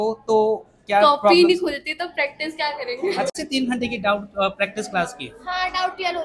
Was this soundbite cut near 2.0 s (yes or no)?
no